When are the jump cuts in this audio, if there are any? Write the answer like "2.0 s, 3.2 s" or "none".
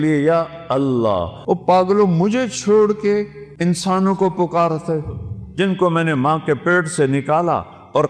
1.3 s, 3.4 s